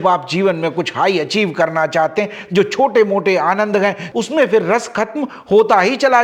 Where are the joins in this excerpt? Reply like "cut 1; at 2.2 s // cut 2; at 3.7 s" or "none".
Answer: cut 1; at 2.4 s // cut 2; at 4.0 s